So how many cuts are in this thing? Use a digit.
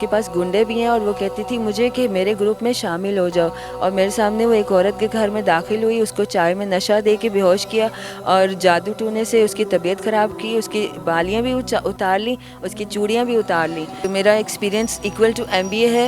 1